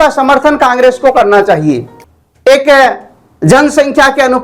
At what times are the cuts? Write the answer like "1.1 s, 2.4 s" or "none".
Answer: 1.9 s